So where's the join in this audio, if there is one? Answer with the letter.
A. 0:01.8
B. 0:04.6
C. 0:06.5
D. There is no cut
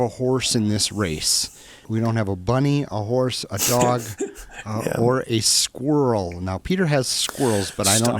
A